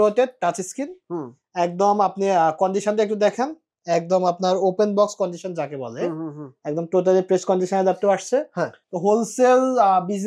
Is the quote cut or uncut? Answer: cut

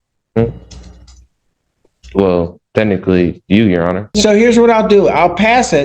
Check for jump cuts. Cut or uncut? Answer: cut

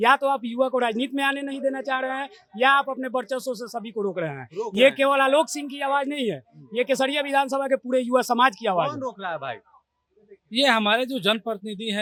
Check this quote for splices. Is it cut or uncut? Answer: uncut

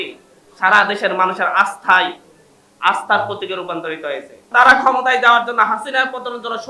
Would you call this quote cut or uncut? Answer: cut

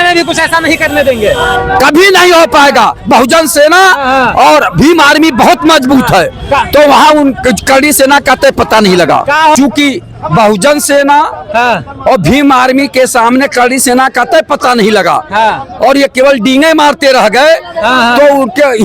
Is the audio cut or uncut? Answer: cut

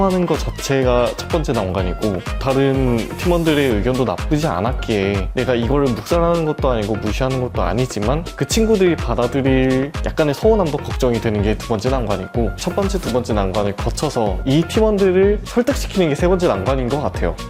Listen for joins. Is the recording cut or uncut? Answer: uncut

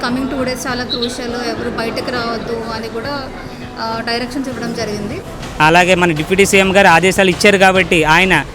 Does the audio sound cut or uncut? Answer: cut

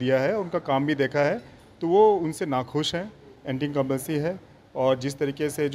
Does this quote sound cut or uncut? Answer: uncut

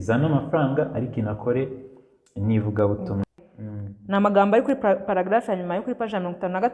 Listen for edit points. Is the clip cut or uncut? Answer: cut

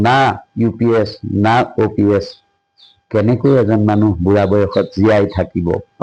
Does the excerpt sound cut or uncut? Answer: uncut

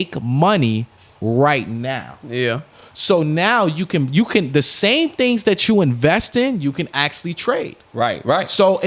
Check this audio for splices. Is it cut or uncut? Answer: uncut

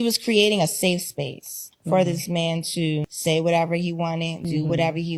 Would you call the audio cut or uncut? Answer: uncut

